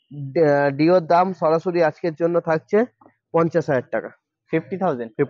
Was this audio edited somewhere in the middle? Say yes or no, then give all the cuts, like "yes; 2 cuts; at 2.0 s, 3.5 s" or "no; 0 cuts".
no; 0 cuts